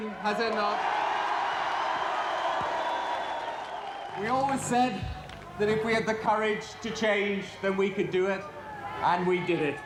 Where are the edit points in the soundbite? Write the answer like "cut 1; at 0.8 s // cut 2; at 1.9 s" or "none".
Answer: none

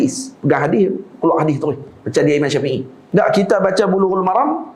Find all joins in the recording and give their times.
cut 1; at 2.9 s

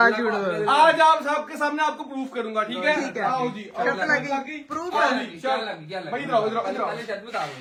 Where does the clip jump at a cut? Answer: none

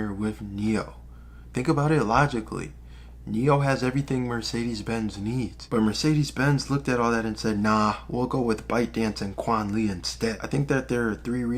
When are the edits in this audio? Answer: cut 1; at 5.6 s

